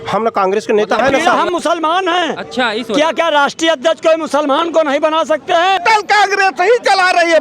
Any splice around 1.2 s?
yes; 2 cuts; at 1.2 s, 5.8 s

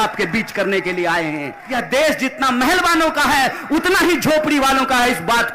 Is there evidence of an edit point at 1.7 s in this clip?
yes; 1 cut; at 1.7 s

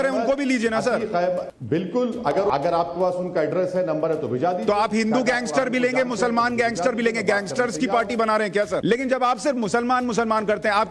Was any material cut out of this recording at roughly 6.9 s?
no; 3 cuts; at 1.5 s, 2.5 s, 8.8 s

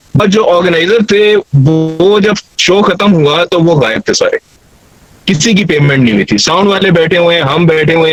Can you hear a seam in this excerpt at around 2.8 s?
no; 0 cuts

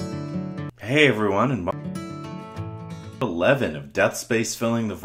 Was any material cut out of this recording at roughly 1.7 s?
yes; 2 cuts; at 1.7 s, 3.1 s

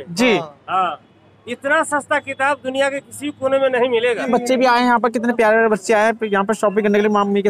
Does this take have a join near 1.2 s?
no; 1 cut; at 4.3 s

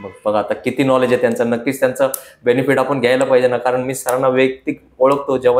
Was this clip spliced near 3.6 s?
no; 0 cuts

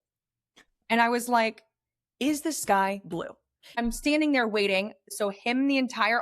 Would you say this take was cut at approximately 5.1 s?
yes; 2 cuts; at 3.8 s, 5.1 s

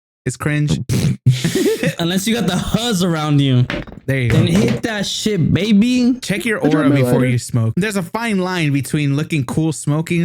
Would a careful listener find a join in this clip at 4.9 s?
no; 2 cuts; at 2.0 s, 7.7 s

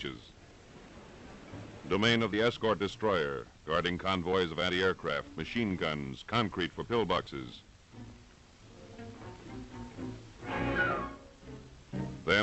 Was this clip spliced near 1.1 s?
no; 0 cuts

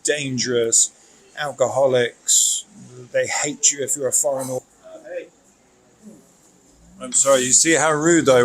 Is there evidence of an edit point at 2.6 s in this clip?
no; 1 cut; at 4.6 s

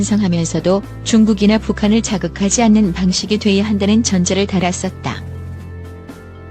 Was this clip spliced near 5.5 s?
yes; 1 cut; at 5.5 s

